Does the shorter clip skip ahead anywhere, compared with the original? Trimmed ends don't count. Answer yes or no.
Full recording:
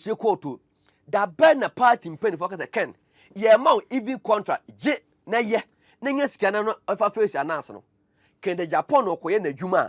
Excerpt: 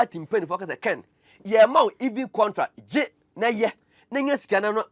no